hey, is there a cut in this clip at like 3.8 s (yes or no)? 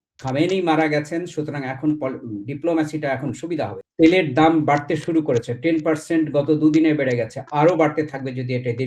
yes